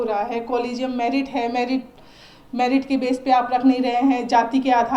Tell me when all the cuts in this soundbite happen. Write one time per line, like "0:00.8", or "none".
none